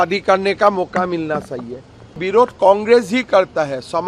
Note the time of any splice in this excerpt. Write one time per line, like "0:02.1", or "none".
0:02.2